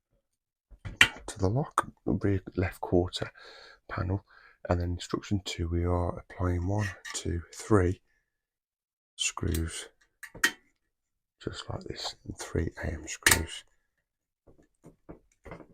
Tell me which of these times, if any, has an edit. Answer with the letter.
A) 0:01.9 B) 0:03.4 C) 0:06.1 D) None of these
A